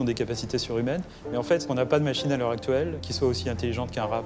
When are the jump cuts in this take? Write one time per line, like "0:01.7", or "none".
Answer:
0:01.6
0:03.0